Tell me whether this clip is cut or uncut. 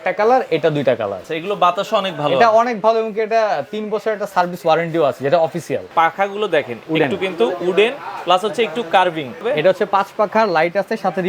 cut